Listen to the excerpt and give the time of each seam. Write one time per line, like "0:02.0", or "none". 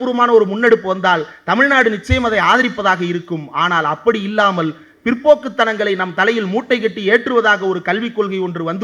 none